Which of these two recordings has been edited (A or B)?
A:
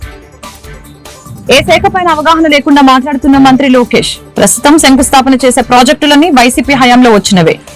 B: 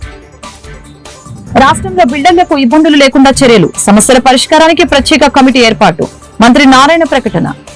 B